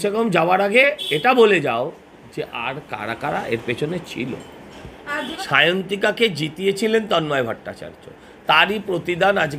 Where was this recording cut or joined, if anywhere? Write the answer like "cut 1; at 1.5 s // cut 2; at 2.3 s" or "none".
cut 1; at 5.4 s